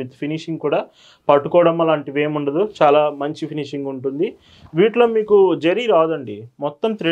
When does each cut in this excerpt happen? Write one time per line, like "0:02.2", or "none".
none